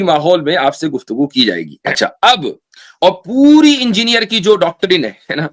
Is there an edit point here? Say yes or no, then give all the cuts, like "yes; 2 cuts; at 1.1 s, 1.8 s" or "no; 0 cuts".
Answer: yes; 1 cut; at 1.7 s